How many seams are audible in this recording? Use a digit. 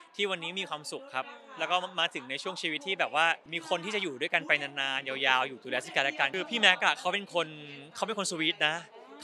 2